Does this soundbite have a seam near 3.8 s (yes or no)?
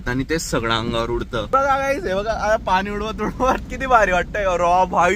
no